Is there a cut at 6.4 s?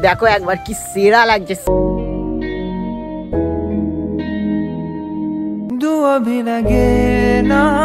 no; 1 cut; at 1.7 s

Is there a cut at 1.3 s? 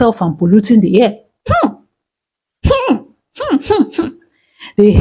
yes; 1 cut; at 1.3 s

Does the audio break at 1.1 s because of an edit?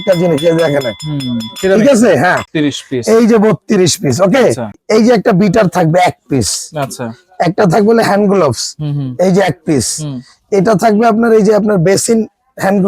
no; 2 cuts; at 2.5 s, 4.8 s

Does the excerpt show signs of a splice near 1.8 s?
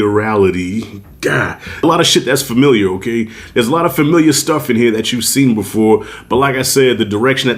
yes; 1 cut; at 1.8 s

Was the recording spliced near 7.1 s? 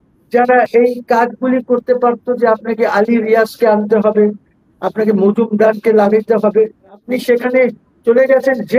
yes; 1 cut; at 7.1 s

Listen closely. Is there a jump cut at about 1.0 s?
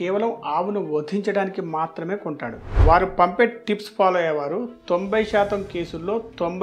no; 1 cut; at 2.7 s

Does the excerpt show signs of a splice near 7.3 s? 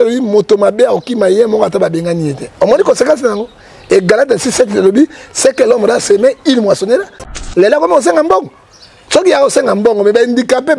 yes; 1 cut; at 7.3 s

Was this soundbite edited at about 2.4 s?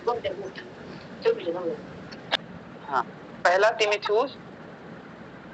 yes; 1 cut; at 2.4 s

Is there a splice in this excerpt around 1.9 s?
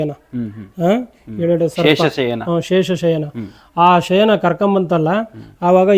no; 0 cuts

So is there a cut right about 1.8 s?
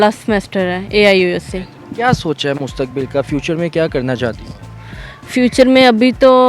no; 0 cuts

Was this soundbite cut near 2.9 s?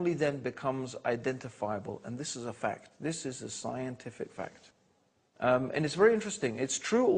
no; 0 cuts

